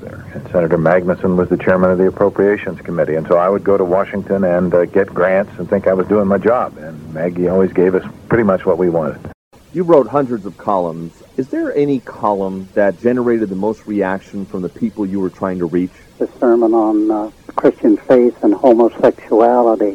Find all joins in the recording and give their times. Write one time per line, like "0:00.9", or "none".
0:09.6